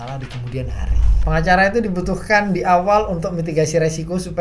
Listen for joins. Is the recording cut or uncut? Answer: cut